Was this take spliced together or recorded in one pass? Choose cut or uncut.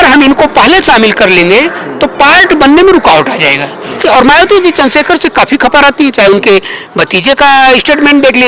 cut